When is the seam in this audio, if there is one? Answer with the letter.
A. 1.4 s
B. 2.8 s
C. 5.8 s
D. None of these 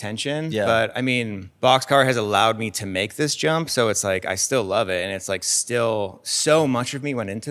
A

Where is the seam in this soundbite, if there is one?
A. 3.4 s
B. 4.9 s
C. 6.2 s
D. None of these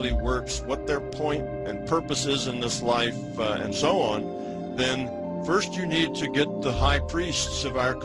C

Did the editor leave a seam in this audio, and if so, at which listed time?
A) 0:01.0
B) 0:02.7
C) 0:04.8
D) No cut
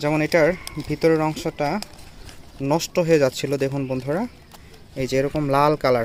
D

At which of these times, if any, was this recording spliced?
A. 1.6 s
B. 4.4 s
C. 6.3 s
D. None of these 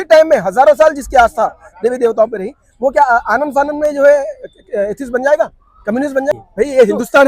C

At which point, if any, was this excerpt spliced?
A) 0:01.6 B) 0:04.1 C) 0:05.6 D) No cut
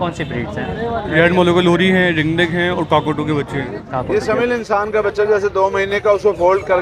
B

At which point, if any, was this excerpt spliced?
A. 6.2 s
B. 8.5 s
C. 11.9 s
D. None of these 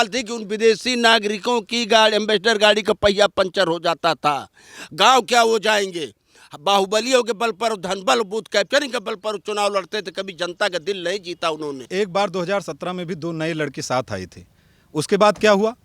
C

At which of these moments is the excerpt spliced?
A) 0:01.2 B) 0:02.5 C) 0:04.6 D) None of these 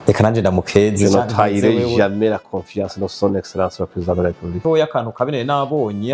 C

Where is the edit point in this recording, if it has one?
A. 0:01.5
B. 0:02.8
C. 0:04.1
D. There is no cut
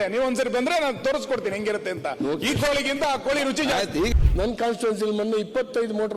C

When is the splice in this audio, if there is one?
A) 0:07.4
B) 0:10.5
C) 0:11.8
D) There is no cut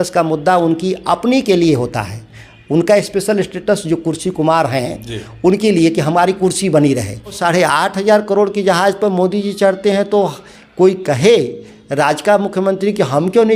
A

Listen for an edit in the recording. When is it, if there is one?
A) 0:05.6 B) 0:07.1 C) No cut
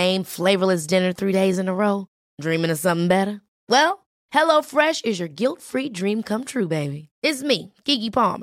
C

